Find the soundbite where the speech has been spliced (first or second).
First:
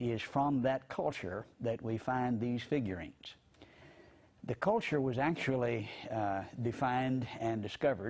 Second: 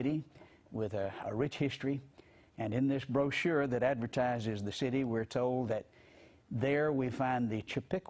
first